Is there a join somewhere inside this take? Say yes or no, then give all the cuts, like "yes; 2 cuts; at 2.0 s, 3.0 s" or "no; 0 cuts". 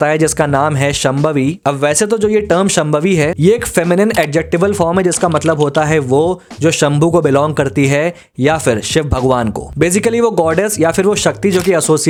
no; 0 cuts